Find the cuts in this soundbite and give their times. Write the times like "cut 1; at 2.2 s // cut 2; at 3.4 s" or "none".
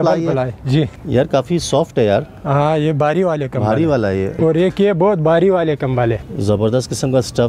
cut 1; at 1.0 s // cut 2; at 4.3 s // cut 3; at 6.3 s